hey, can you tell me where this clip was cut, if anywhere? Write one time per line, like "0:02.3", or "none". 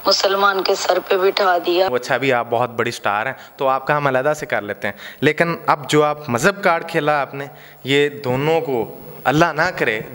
0:01.9